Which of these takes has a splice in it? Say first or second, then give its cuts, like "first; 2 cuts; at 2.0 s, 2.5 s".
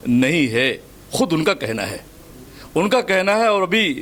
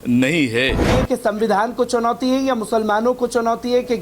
second; 1 cut; at 0.9 s